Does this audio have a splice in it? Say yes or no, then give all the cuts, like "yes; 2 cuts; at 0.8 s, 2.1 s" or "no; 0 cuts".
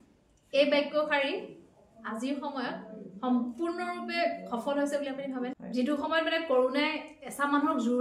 yes; 1 cut; at 5.5 s